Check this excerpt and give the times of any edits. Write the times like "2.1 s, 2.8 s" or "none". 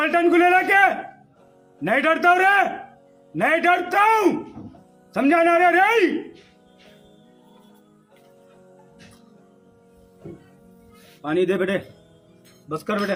none